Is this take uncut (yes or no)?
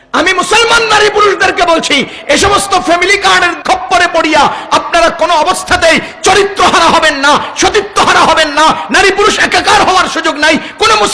no